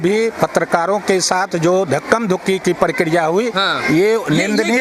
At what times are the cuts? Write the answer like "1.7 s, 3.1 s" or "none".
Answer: none